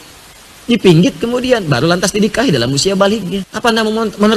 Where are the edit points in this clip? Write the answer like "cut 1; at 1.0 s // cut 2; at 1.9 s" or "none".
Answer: cut 1; at 3.5 s